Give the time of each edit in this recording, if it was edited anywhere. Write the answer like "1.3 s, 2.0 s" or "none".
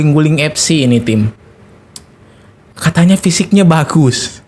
none